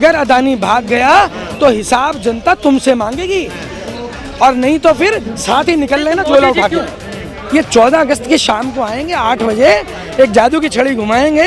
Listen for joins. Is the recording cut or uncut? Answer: cut